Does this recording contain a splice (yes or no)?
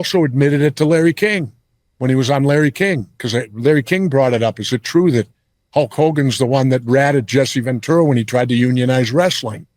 no